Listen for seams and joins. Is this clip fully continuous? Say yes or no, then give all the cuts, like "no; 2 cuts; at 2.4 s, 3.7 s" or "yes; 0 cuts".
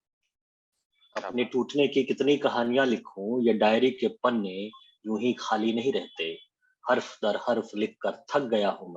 yes; 0 cuts